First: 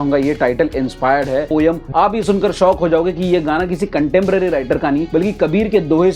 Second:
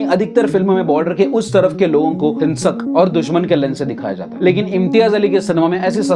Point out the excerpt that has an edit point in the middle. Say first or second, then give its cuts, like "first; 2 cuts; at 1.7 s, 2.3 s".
first; 1 cut; at 1.8 s